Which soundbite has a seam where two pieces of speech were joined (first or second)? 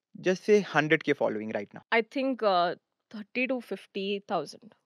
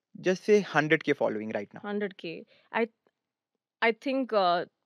first